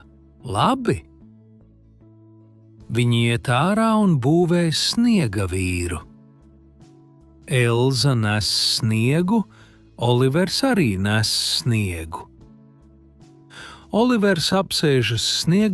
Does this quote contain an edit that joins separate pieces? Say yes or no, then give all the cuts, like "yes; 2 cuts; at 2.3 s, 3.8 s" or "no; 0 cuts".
yes; 4 cuts; at 1.0 s, 2.9 s, 12.3 s, 13.9 s